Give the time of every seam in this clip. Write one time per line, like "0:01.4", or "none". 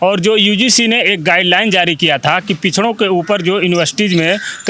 none